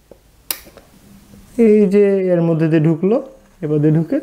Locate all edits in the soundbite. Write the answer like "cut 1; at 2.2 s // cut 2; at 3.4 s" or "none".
cut 1; at 0.9 s